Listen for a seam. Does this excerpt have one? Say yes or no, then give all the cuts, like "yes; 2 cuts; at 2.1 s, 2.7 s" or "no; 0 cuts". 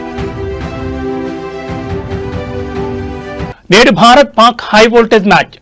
yes; 1 cut; at 3.0 s